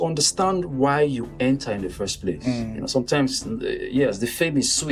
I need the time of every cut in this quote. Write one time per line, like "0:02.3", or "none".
none